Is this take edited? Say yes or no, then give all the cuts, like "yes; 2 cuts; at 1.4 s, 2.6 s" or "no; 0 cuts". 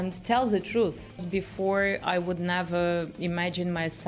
yes; 1 cut; at 1.2 s